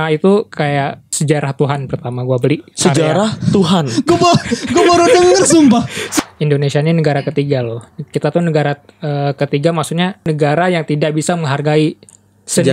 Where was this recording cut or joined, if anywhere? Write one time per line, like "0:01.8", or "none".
0:01.0
0:06.0
0:10.3